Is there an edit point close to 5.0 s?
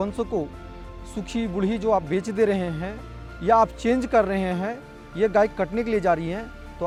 no; 0 cuts

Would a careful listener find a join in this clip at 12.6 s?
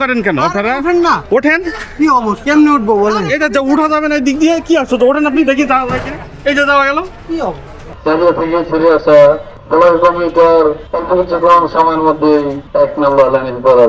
yes; 4 cuts; at 8.0 s, 9.5 s, 10.9 s, 12.6 s

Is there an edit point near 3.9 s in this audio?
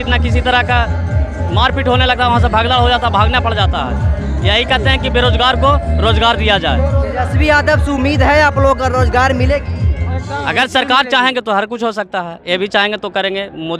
no; 0 cuts

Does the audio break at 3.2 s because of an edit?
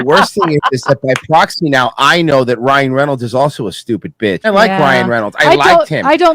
no; 1 cut; at 4.5 s

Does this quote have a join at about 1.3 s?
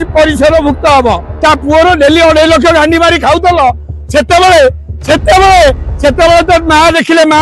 yes; 1 cut; at 1.3 s

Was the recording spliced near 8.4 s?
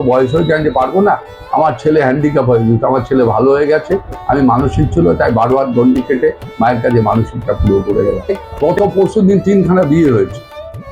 yes; 1 cut; at 8.4 s

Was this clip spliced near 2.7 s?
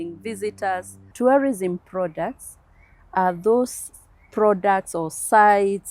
no; 1 cut; at 1.0 s

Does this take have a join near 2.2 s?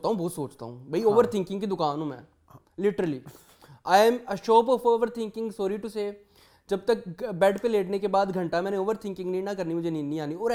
no; 0 cuts

